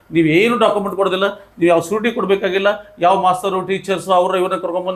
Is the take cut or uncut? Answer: uncut